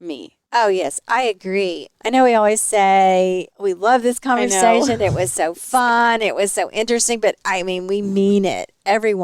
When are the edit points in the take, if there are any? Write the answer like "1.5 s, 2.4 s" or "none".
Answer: 1.9 s